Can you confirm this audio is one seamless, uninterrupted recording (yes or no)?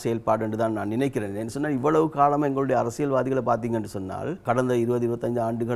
no